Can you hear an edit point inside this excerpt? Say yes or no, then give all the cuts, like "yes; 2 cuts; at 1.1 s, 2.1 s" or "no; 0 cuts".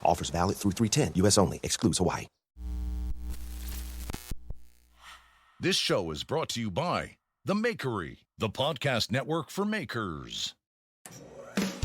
yes; 1 cut; at 2.5 s